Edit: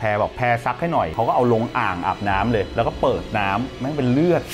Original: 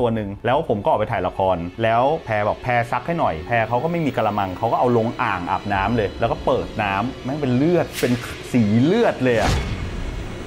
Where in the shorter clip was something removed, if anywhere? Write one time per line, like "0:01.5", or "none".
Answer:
0:01.1